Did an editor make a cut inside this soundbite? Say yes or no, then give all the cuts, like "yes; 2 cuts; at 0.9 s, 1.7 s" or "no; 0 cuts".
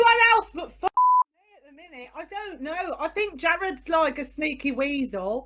no; 0 cuts